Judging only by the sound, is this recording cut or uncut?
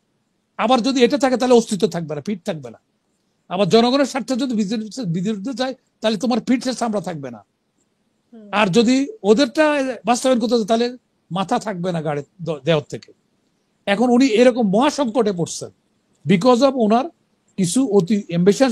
uncut